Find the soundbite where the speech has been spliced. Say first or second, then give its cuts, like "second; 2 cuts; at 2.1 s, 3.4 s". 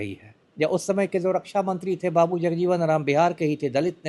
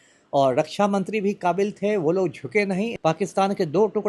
second; 1 cut; at 2.9 s